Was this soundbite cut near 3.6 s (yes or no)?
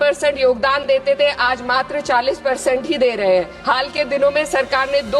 yes